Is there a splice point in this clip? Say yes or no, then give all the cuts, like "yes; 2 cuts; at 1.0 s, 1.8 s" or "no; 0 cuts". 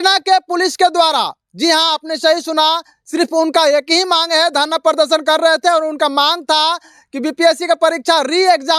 no; 0 cuts